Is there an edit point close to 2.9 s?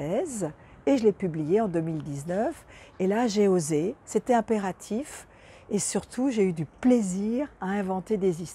no; 0 cuts

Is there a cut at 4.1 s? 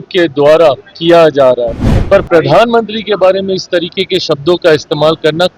no; 1 cut; at 1.9 s

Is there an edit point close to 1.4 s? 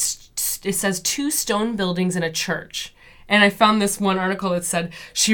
no; 0 cuts

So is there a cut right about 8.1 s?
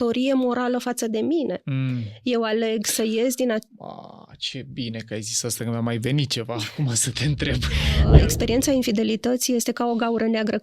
yes; 1 cut; at 8.1 s

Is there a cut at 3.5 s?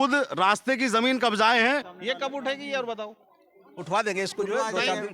no; 1 cut; at 1.9 s

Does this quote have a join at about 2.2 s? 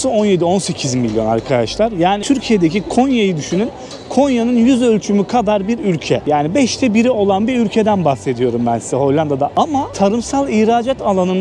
yes; 2 cuts; at 2.2 s, 6.2 s

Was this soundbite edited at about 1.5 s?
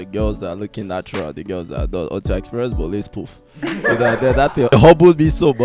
no; 1 cut; at 4.7 s

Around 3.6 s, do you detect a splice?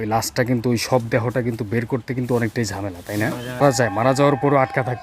yes; 1 cut; at 3.6 s

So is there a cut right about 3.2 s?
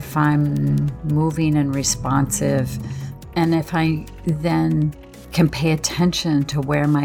yes; 2 cuts; at 1.0 s, 3.2 s

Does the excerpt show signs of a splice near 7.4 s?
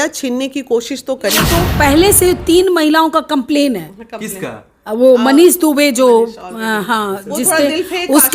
no; 1 cut; at 1.5 s

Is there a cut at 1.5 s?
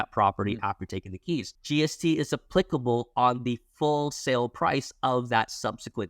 yes; 1 cut; at 1.5 s

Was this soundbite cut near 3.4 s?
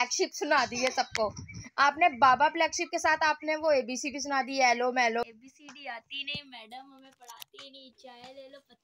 no; 1 cut; at 5.2 s

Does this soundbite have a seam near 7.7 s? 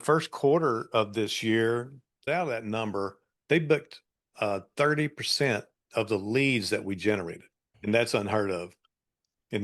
yes; 2 cuts; at 2.1 s, 7.7 s

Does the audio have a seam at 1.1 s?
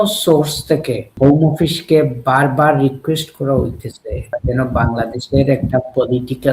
yes; 2 cuts; at 1.1 s, 4.4 s

